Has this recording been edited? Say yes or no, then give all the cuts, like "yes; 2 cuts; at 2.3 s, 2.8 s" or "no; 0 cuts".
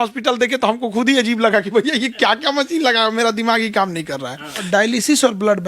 yes; 1 cut; at 4.6 s